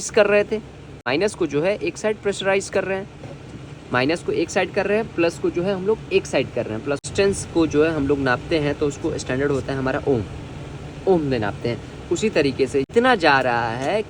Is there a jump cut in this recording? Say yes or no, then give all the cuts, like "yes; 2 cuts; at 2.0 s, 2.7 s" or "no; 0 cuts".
yes; 3 cuts; at 1.1 s, 7.1 s, 12.9 s